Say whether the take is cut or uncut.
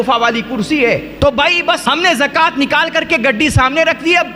cut